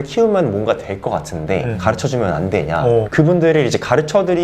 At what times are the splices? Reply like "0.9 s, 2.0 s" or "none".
3.1 s